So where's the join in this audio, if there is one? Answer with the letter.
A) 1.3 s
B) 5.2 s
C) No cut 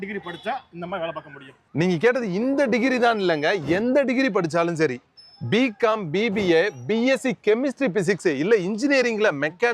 C